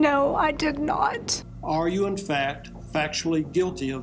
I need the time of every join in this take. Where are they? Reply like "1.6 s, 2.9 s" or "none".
1.4 s